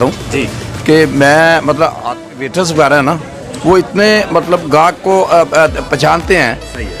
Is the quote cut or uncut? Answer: cut